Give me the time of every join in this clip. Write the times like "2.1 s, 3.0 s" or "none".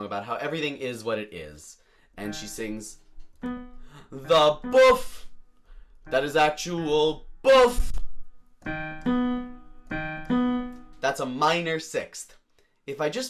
none